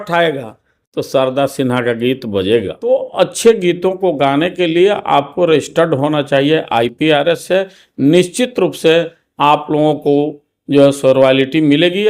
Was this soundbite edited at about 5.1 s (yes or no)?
no